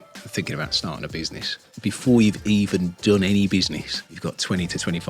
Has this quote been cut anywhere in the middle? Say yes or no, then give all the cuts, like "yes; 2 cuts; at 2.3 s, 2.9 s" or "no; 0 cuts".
yes; 2 cuts; at 1.7 s, 4.0 s